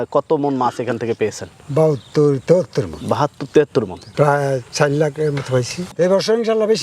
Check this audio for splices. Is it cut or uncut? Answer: cut